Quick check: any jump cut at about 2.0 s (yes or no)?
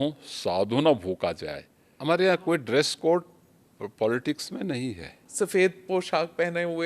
yes